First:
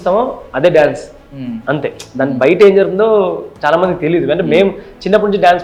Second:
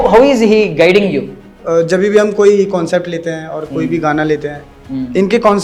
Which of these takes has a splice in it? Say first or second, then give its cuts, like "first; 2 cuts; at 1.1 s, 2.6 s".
second; 1 cut; at 1.5 s